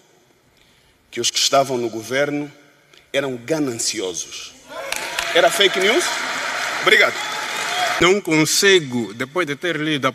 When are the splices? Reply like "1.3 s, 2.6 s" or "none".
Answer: 8.0 s

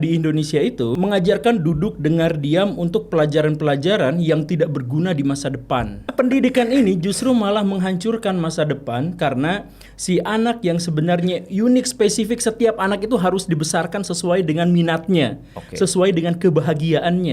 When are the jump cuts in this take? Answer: 0.9 s, 6.0 s

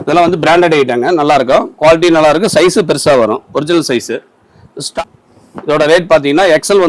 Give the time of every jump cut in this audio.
4.9 s

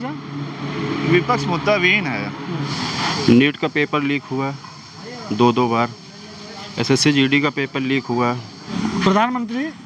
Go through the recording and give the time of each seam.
2.7 s, 8.6 s

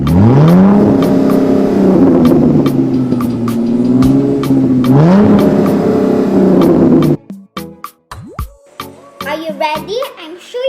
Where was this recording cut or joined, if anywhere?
9.3 s

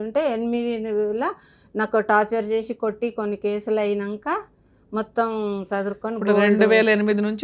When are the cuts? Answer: none

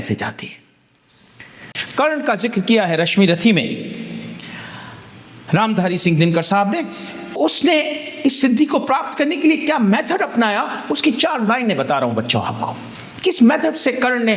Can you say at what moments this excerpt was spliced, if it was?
1.8 s

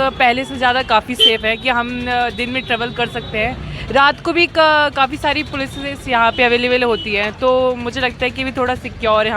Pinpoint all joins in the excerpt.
none

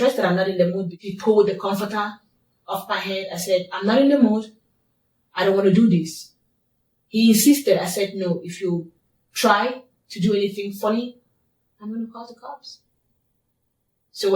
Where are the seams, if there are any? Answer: 0.9 s

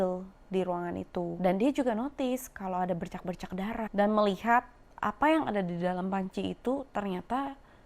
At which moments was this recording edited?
1.3 s, 3.9 s

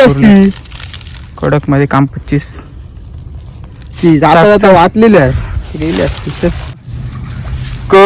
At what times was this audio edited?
7.0 s

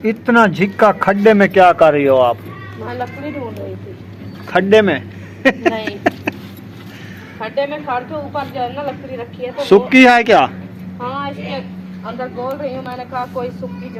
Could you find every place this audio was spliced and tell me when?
none

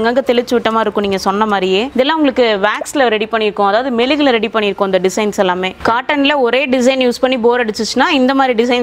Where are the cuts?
1.9 s, 5.8 s

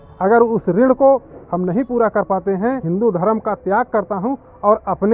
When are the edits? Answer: 2.8 s

